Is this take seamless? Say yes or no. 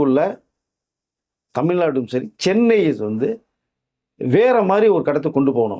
yes